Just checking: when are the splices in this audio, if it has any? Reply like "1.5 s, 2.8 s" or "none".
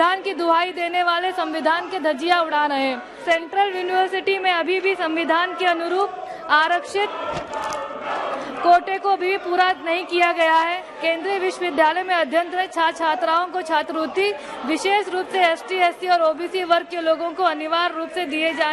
3.1 s, 10.9 s